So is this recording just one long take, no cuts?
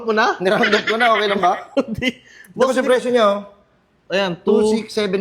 yes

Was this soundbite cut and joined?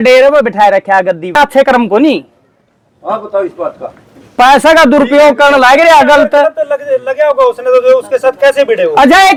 no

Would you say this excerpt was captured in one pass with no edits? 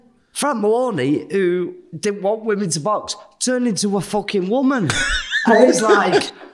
yes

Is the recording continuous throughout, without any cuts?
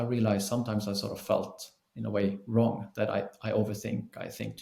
yes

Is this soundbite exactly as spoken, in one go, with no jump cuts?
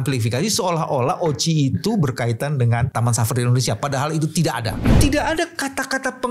no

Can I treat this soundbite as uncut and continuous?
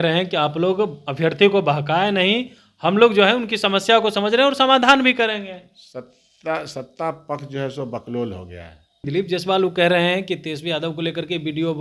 no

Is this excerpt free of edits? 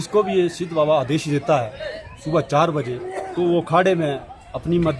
yes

